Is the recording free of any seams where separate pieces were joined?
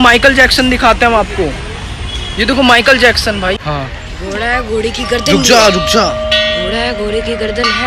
no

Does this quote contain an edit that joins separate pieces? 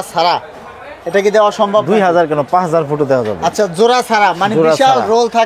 no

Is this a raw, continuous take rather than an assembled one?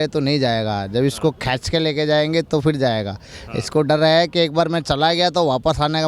yes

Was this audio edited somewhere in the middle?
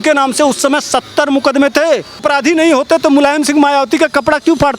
yes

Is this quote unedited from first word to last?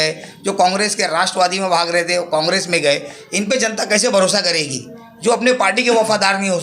yes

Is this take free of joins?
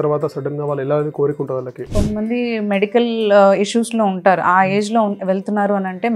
no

